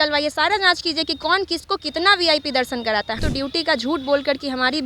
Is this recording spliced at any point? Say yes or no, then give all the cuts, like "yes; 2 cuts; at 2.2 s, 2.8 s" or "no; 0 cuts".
yes; 1 cut; at 3.2 s